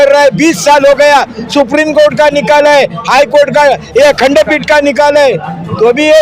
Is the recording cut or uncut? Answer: uncut